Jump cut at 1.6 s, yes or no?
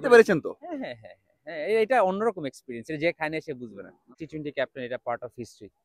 no